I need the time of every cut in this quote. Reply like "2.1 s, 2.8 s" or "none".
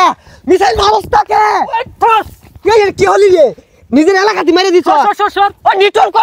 none